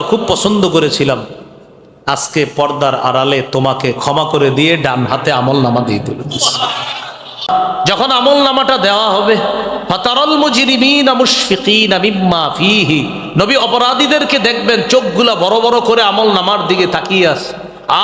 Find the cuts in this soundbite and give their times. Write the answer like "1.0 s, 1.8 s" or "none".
7.5 s